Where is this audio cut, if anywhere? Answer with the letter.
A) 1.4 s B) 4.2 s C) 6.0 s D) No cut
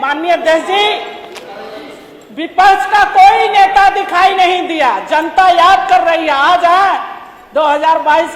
D